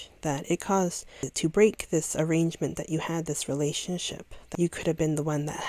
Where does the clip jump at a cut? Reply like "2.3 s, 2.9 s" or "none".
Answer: 1.3 s, 4.3 s